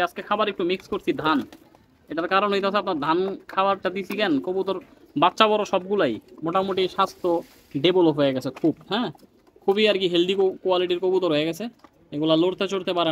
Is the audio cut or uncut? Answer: uncut